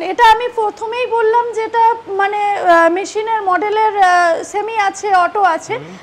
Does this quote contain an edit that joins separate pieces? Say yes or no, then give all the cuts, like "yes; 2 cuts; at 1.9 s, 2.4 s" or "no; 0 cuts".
no; 0 cuts